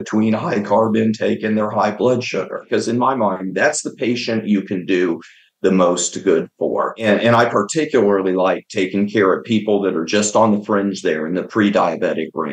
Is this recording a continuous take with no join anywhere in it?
no; 2 cuts; at 2.6 s, 7.0 s

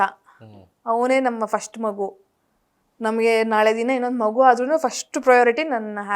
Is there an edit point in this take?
no; 0 cuts

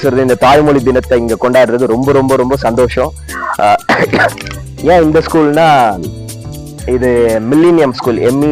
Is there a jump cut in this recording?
no; 0 cuts

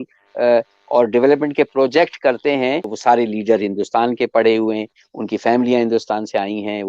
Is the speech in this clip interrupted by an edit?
yes; 1 cut; at 2.9 s

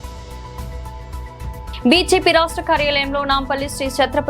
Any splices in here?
yes; 1 cut; at 1.4 s

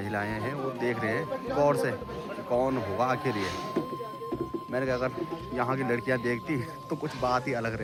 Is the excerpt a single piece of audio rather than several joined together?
yes; 0 cuts

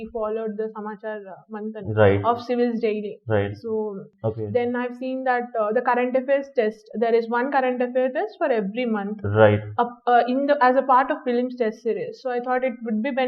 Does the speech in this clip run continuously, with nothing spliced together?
no; 1 cut; at 4.1 s

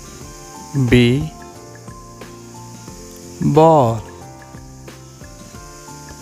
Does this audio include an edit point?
yes; 4 cuts; at 0.7 s, 1.9 s, 3.4 s, 4.4 s

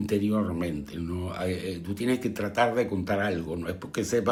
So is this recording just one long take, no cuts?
yes; 0 cuts

